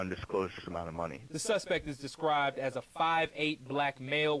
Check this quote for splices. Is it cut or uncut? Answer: cut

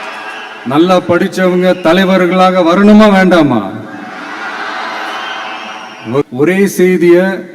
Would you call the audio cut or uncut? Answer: cut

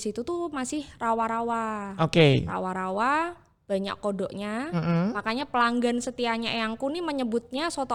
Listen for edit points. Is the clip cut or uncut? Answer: uncut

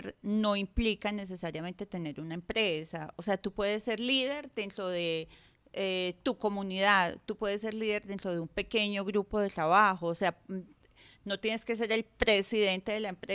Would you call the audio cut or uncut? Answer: uncut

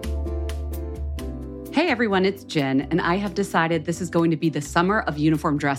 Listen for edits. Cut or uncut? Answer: cut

